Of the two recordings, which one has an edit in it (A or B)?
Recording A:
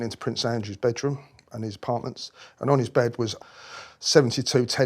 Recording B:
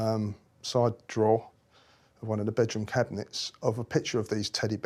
A